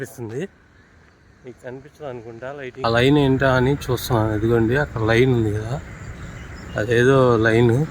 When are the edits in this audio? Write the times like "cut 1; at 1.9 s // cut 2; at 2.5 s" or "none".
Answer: cut 1; at 2.8 s